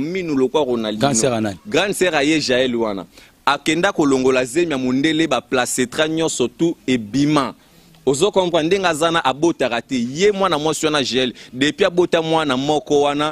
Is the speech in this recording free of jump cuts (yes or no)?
yes